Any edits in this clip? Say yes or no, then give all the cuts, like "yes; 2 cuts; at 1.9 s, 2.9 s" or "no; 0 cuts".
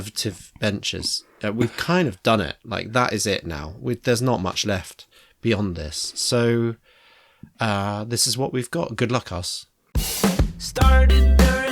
yes; 1 cut; at 10.2 s